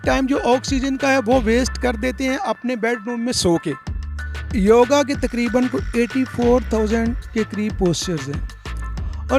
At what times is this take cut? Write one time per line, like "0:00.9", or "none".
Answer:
0:04.3